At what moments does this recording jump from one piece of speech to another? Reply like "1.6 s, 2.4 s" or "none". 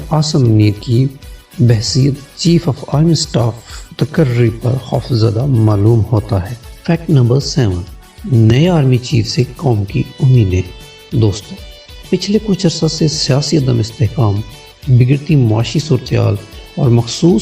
none